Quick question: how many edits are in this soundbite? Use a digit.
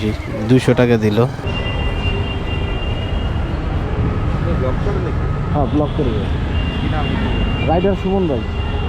1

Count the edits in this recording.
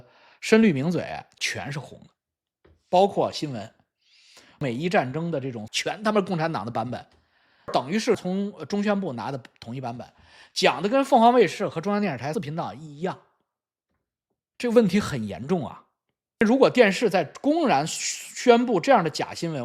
2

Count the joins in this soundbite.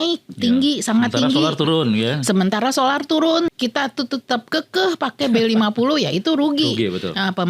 1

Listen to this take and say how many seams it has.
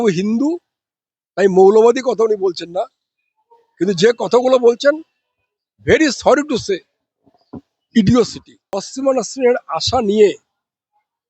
1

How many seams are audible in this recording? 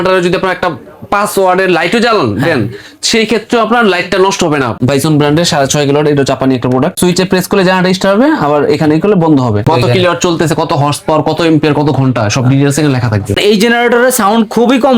4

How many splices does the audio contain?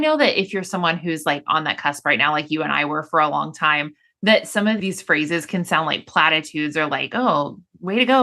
1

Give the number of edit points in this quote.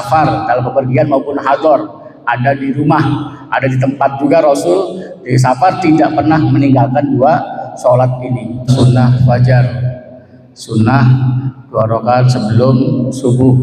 1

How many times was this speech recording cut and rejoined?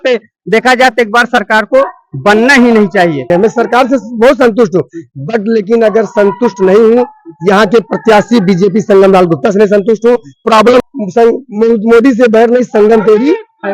2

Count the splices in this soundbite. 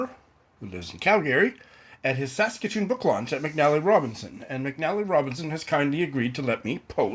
0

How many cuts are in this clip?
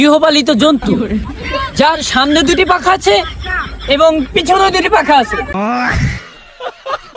1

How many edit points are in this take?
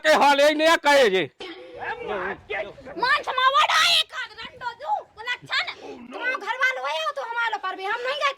2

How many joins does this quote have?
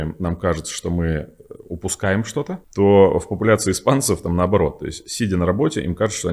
1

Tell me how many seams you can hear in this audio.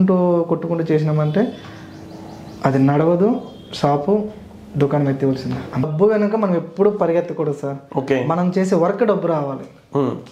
1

